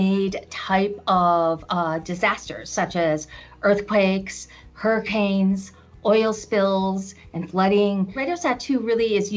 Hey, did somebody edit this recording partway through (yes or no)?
yes